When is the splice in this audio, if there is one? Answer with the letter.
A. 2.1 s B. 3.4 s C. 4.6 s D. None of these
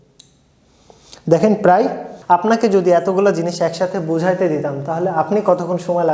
A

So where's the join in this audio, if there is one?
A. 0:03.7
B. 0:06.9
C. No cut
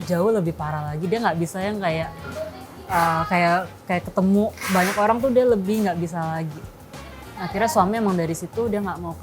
C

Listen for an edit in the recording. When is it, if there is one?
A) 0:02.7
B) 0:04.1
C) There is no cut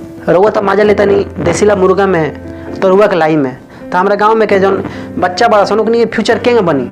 C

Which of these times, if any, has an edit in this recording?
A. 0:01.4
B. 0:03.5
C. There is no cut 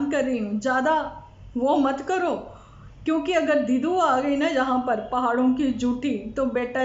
C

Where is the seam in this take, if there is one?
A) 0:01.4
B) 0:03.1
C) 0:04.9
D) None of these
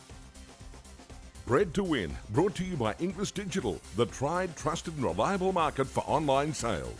A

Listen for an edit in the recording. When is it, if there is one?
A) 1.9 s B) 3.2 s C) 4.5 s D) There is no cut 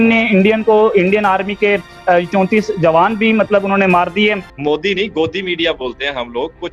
C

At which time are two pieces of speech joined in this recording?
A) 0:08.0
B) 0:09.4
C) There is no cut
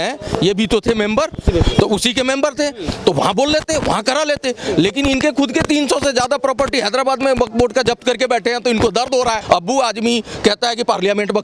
B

